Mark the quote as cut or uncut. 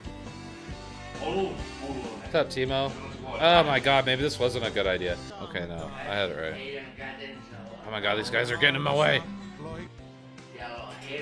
cut